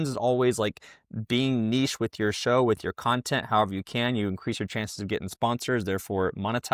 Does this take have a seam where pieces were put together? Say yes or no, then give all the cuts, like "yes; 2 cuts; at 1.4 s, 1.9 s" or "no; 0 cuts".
no; 0 cuts